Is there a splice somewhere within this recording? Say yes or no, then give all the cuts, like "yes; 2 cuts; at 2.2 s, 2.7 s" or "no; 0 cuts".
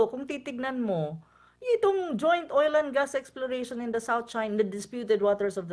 no; 0 cuts